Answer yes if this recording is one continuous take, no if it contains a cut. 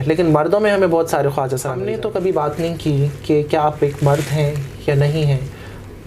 no